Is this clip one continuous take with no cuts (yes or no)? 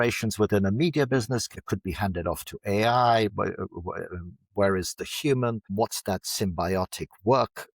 no